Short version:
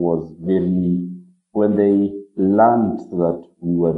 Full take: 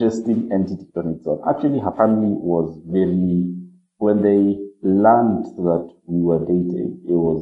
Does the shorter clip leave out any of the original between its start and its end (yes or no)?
no